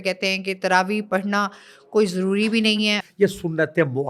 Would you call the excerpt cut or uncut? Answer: cut